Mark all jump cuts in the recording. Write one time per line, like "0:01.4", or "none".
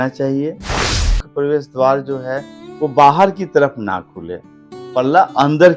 0:01.2